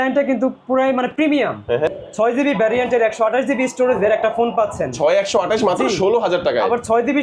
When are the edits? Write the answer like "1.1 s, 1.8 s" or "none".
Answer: 1.9 s

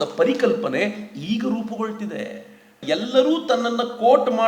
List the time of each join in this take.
2.8 s

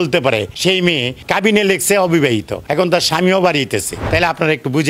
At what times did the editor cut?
0.8 s, 2.6 s, 4.0 s

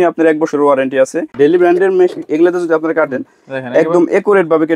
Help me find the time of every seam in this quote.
1.3 s

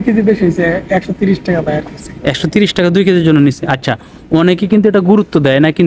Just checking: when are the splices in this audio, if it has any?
none

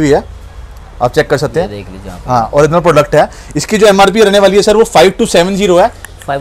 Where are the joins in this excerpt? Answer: none

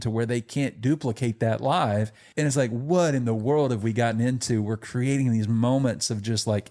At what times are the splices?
2.2 s

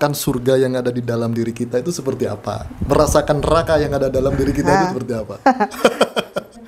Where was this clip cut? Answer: none

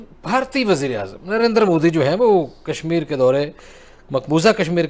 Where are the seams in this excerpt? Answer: none

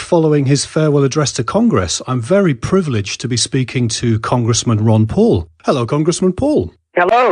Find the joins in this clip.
4.0 s

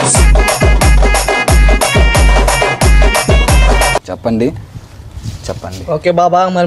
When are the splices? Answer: none

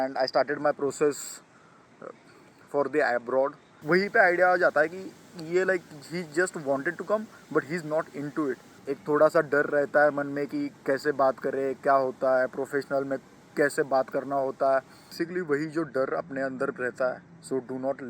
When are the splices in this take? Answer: 3.7 s, 8.7 s, 15.1 s

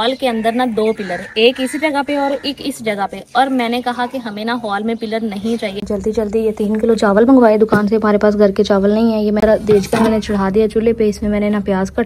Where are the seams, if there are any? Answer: 5.9 s, 9.4 s

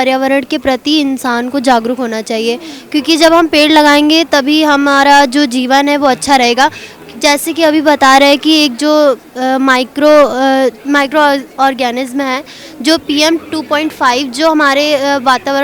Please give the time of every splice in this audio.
none

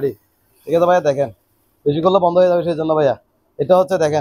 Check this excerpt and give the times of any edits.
none

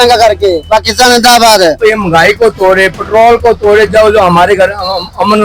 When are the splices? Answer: 1.8 s

